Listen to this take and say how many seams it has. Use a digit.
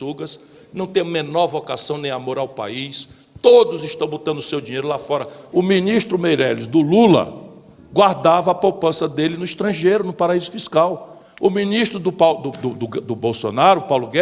1